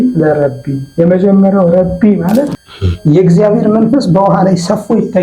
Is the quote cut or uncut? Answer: cut